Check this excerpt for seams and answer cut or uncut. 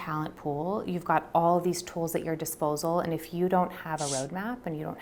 uncut